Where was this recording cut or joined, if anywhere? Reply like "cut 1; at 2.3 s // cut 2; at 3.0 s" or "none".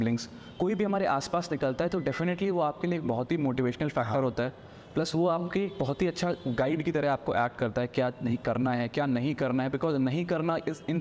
none